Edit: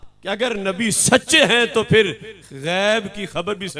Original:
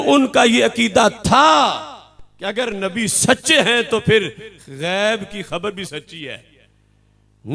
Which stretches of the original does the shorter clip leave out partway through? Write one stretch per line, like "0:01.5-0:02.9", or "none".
none